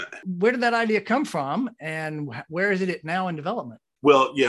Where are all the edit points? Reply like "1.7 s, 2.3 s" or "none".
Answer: none